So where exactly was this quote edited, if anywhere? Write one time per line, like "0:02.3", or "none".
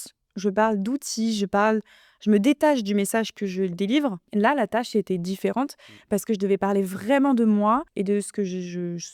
0:04.2
0:07.9